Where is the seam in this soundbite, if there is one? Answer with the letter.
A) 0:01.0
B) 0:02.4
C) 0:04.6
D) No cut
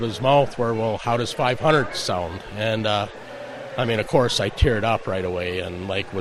D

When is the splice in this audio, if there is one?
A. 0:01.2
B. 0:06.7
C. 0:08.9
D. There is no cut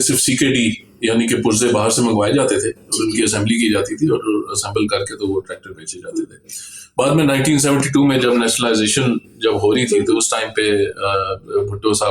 D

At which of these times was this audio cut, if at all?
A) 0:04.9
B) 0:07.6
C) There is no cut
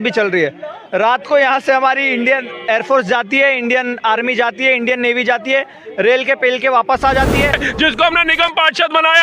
B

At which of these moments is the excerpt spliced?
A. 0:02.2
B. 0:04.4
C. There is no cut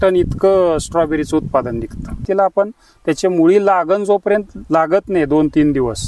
A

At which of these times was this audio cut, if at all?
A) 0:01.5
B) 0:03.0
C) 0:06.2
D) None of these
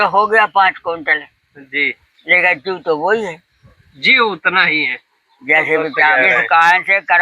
C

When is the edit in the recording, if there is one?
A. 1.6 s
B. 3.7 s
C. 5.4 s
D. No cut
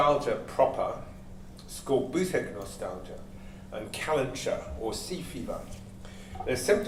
D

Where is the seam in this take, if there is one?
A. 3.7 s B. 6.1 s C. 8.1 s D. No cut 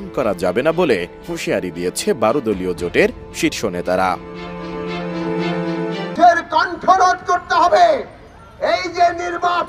B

